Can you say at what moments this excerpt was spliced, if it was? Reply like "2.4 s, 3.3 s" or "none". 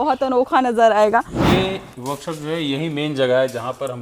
1.4 s